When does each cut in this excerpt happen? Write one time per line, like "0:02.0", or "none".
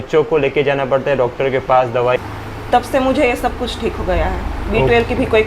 0:02.2